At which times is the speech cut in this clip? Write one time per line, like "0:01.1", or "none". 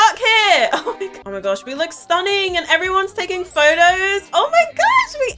0:01.2

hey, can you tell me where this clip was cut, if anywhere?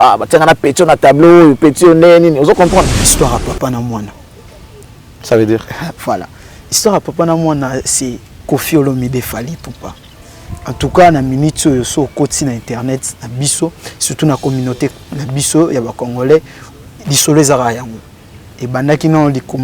0:03.0

